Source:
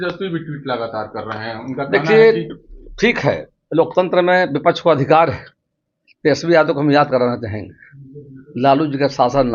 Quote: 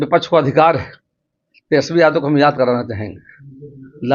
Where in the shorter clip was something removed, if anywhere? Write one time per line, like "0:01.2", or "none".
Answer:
none